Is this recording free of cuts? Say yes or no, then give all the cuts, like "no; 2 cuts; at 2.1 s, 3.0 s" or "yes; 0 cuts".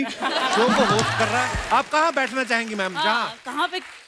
no; 1 cut; at 1.5 s